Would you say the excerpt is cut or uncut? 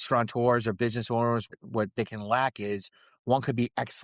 cut